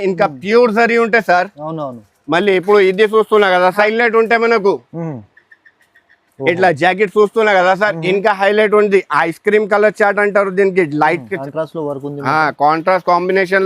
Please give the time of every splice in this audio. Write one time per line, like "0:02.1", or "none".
0:03.8
0:11.3

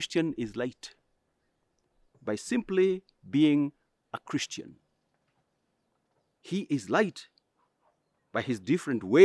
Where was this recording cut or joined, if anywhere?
none

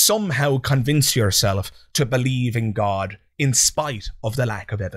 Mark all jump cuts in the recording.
none

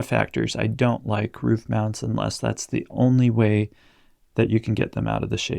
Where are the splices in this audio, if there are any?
none

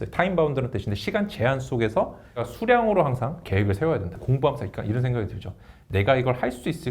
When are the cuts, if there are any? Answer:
0:02.5
0:03.9

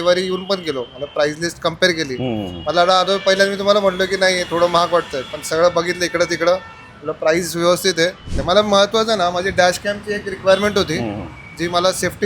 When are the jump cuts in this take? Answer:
0:08.3

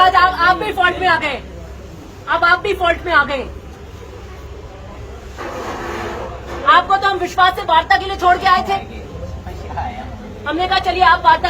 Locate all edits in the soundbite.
none

